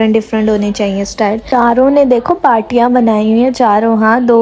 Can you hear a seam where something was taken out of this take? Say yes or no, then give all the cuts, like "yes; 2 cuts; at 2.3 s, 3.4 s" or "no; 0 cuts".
yes; 1 cut; at 1.4 s